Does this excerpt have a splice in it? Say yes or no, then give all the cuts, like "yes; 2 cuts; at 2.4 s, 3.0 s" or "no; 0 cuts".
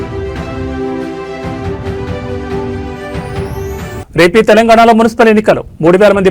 yes; 2 cuts; at 2.9 s, 3.9 s